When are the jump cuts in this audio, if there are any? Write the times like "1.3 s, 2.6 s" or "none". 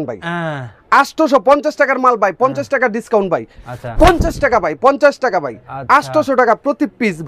none